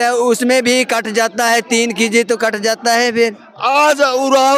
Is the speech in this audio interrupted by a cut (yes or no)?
yes